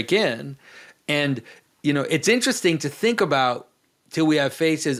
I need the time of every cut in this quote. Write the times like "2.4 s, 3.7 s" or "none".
none